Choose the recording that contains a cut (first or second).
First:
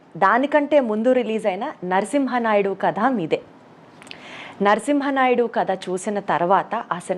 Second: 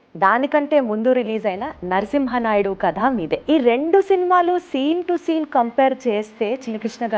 second